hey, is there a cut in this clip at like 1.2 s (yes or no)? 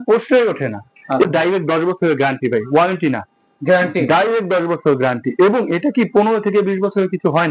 yes